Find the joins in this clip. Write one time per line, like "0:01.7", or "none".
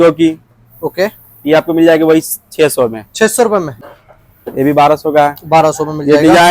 0:03.8